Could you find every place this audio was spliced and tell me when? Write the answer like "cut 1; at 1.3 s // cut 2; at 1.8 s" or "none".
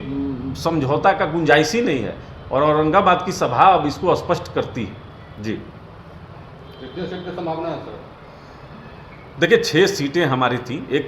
none